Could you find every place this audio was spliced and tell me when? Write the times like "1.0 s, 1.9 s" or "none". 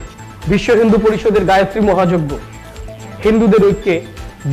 none